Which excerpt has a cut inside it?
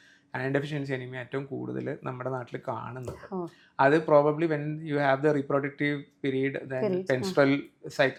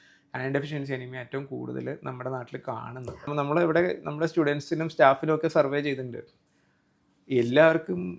second; 1 cut; at 3.3 s

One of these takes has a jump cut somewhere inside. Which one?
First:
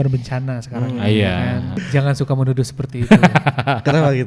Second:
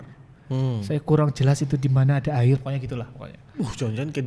first; 1 cut; at 1.8 s

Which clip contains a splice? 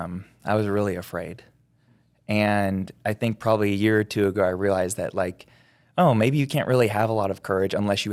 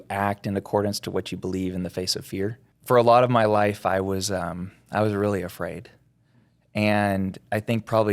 second; 1 cut; at 2.7 s

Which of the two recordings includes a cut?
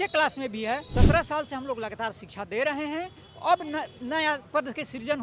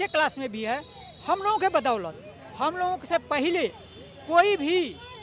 first; 1 cut; at 0.9 s

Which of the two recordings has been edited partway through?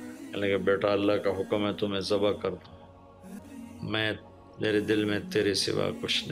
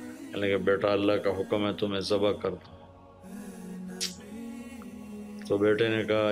first; 1 cut; at 3.4 s

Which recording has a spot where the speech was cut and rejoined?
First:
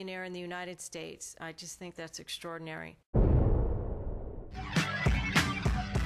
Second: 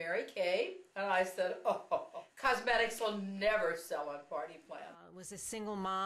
first; 1 cut; at 4.5 s

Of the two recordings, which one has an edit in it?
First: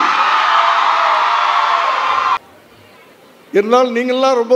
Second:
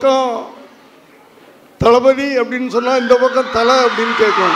first; 1 cut; at 2.4 s

